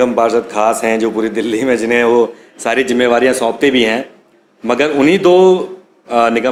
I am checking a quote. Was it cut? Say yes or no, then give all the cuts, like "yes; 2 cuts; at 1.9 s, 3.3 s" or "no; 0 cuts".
no; 0 cuts